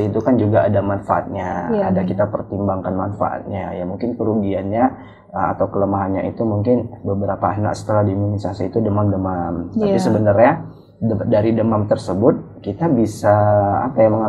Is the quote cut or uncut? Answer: uncut